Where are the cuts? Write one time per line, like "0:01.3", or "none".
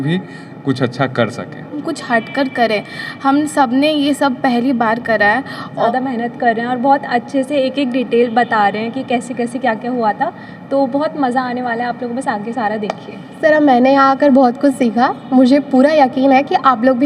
0:01.8
0:05.9
0:13.4